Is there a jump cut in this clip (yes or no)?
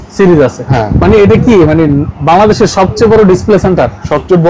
no